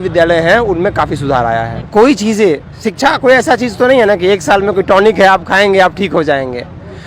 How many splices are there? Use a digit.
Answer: 1